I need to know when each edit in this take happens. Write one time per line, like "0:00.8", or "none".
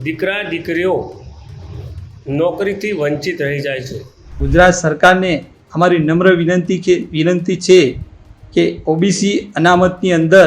0:04.4